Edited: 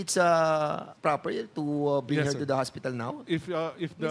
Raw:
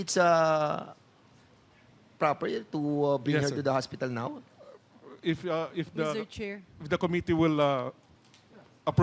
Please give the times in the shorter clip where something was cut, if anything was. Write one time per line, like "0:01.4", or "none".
0:00.9
0:03.2